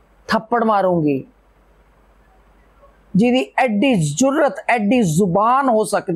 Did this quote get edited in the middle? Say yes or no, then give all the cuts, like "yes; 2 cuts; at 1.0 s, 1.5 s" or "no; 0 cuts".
no; 0 cuts